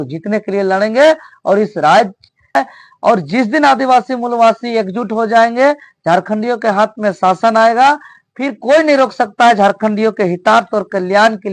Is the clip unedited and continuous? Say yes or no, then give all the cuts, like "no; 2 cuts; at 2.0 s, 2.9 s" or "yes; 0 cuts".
no; 1 cut; at 2.6 s